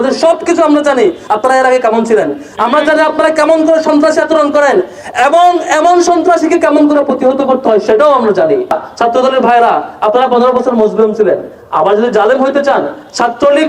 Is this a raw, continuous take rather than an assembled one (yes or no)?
no